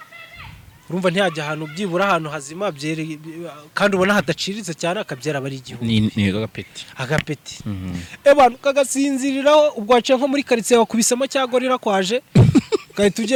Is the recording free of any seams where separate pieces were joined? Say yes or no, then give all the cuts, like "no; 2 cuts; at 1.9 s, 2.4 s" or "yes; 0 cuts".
yes; 0 cuts